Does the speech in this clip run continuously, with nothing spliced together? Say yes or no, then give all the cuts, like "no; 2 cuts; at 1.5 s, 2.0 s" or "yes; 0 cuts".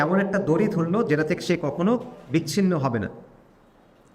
yes; 0 cuts